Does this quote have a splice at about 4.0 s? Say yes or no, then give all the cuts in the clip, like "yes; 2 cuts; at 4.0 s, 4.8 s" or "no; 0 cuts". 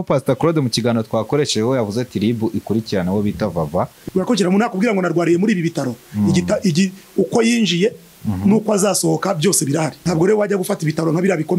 yes; 2 cuts; at 4.0 s, 10.0 s